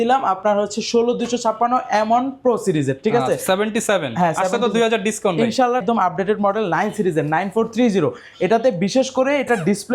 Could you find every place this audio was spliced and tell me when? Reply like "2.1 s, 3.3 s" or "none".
5.8 s